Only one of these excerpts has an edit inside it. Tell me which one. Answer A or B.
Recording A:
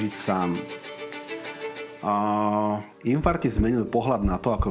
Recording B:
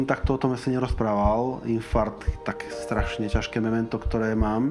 A